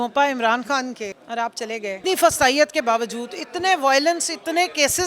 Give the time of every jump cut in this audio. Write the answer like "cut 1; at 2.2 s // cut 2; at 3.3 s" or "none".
cut 1; at 1.2 s // cut 2; at 2.0 s